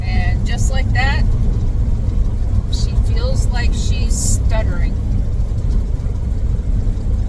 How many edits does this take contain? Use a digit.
0